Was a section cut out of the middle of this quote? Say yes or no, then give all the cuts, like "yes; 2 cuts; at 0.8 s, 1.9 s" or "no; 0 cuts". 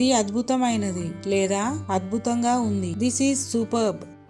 no; 0 cuts